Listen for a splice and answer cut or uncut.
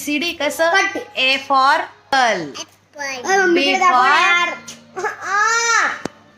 cut